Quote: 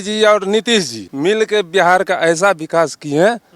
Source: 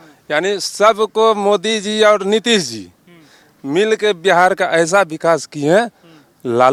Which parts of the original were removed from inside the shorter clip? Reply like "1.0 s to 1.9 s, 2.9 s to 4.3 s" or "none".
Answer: 2.8 s to 3.5 s